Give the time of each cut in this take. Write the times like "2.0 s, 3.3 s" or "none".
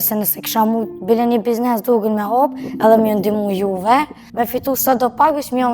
4.2 s